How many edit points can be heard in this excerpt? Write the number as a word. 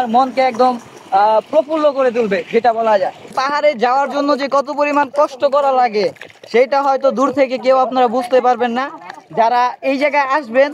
one